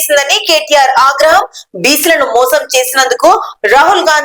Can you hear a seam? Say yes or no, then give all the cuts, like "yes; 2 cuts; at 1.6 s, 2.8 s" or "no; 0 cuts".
no; 0 cuts